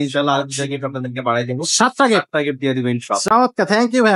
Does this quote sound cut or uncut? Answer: uncut